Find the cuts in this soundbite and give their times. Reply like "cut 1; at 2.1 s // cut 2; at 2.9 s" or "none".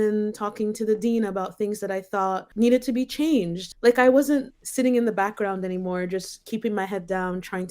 cut 1; at 2.4 s // cut 2; at 3.6 s // cut 3; at 4.6 s